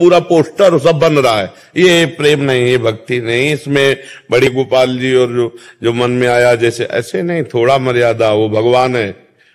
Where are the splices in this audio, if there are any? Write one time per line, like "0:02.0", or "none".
0:04.5